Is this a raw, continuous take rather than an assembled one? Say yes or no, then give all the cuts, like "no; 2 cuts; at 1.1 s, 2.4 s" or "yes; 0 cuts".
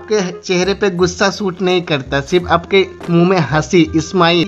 yes; 0 cuts